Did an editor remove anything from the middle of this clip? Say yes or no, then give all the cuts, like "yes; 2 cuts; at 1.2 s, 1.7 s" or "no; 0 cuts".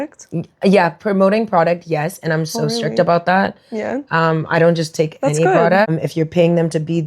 yes; 1 cut; at 5.9 s